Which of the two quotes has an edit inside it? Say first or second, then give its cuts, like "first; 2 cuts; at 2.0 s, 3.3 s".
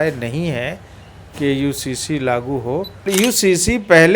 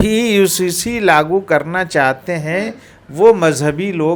first; 1 cut; at 3.0 s